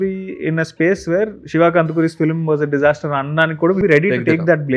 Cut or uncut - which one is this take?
cut